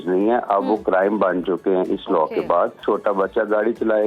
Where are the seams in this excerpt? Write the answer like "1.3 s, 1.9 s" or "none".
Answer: 2.8 s